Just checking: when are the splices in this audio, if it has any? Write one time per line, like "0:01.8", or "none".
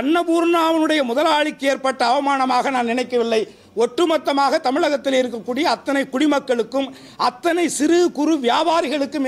none